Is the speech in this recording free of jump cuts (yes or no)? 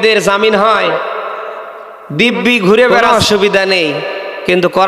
no